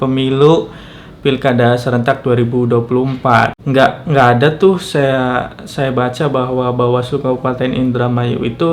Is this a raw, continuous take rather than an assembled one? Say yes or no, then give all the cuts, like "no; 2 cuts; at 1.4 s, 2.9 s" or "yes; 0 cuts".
no; 1 cut; at 3.6 s